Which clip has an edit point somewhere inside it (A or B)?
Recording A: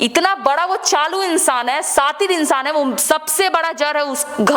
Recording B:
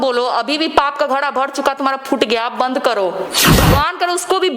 B